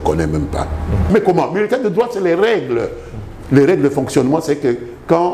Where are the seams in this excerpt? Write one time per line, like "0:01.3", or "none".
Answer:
0:01.1